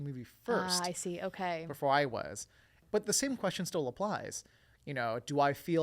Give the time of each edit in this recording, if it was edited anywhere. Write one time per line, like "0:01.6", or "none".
0:02.8